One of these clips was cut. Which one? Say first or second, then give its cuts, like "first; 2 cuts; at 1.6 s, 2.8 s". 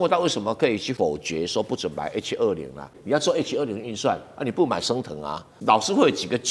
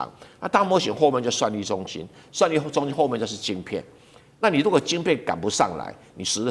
first; 3 cuts; at 0.9 s, 3.0 s, 5.5 s